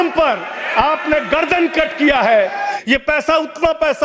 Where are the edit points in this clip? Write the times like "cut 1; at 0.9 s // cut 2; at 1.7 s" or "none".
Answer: cut 1; at 2.8 s